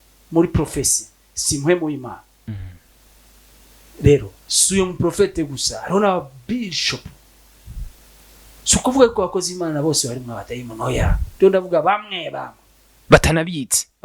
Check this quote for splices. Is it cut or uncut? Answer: cut